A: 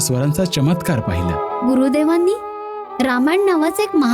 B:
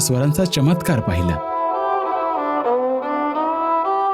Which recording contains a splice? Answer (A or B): A